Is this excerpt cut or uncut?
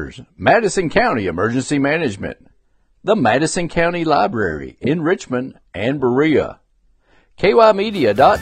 uncut